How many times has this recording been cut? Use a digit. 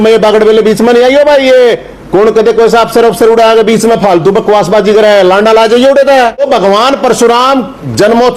1